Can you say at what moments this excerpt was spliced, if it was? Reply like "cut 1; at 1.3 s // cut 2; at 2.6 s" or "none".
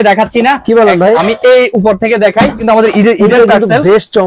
cut 1; at 2.6 s